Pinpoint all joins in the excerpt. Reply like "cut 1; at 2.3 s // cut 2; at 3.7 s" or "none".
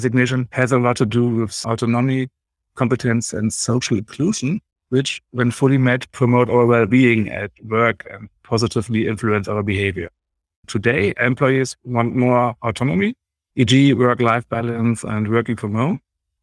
none